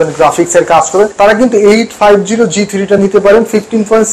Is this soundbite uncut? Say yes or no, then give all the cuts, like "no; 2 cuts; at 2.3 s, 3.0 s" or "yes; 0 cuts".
no; 1 cut; at 1.1 s